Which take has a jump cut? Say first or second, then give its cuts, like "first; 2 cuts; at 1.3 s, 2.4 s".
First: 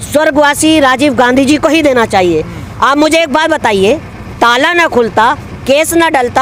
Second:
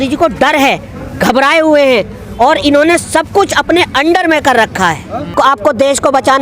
second; 1 cut; at 5.3 s